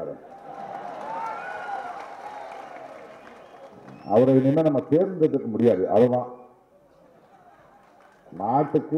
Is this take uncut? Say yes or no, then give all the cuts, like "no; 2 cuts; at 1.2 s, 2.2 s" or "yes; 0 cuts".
yes; 0 cuts